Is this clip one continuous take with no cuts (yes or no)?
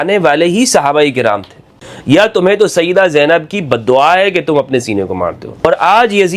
no